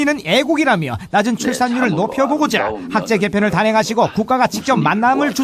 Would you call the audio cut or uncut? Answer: cut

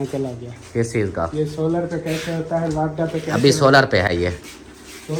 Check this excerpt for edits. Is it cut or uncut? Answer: uncut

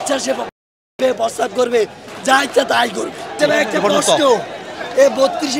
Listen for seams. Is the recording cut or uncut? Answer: cut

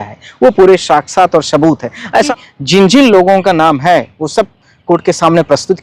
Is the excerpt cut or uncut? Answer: cut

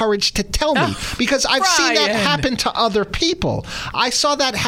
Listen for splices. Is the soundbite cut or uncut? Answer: uncut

